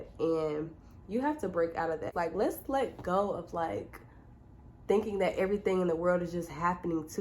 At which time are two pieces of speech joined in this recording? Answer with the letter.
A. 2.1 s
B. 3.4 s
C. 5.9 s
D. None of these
A